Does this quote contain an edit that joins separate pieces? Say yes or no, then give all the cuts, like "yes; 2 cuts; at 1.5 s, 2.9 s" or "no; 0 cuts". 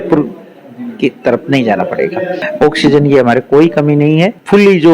no; 0 cuts